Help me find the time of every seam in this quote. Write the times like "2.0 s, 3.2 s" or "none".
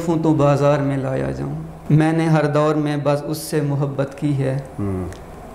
1.7 s